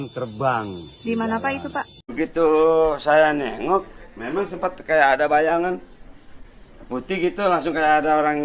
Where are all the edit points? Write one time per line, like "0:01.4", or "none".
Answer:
0:02.0